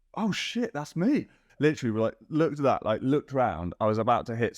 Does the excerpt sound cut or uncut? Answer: cut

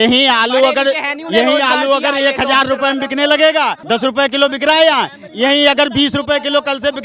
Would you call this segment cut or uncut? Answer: cut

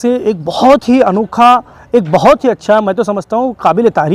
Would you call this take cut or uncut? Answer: uncut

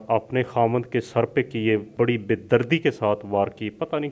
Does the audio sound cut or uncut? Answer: cut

